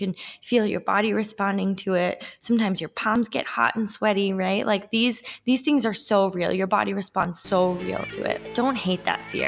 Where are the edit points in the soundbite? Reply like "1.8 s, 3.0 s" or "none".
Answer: 8.5 s